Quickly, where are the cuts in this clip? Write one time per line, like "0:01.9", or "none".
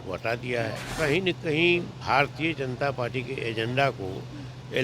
0:00.9